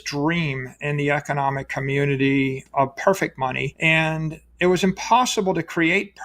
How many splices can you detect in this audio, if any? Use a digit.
2